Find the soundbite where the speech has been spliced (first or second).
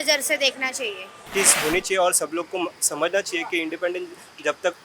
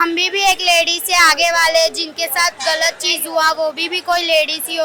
first